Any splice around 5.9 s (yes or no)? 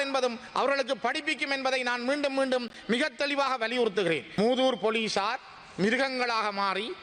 no